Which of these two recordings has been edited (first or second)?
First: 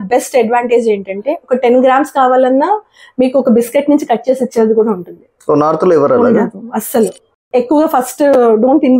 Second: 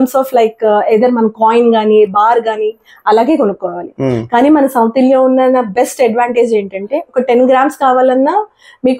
first